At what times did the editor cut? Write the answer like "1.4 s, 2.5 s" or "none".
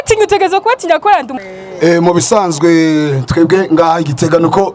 1.4 s